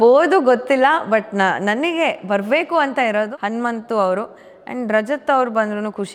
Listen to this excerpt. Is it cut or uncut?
uncut